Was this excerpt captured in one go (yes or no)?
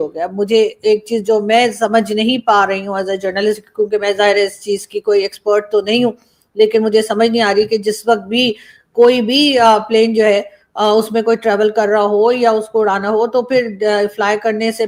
yes